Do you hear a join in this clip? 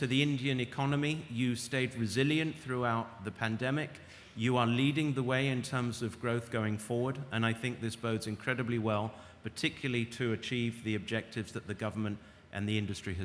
no; 0 cuts

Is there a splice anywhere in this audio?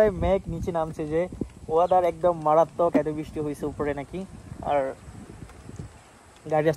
no; 0 cuts

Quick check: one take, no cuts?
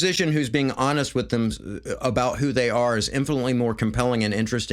yes; 0 cuts

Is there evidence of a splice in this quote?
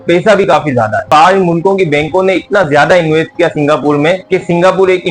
yes; 1 cut; at 1.1 s

